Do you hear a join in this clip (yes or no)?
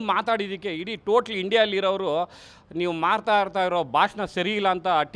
no